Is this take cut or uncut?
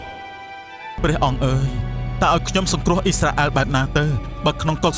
cut